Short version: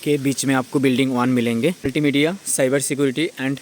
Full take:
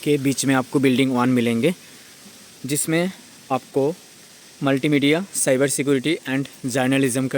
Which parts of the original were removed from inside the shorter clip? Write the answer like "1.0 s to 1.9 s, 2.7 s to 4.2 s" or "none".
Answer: 1.9 s to 4.8 s